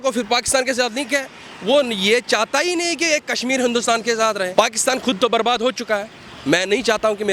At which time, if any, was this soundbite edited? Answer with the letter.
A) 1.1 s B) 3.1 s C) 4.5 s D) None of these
C